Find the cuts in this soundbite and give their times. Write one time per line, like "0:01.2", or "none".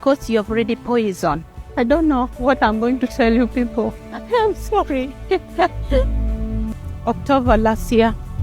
0:01.7